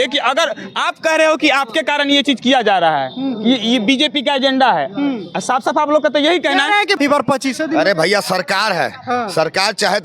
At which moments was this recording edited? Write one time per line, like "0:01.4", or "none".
0:06.9